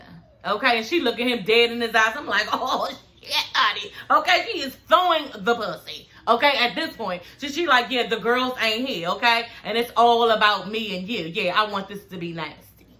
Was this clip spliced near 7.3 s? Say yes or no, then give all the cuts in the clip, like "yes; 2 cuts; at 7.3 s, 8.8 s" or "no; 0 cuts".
no; 0 cuts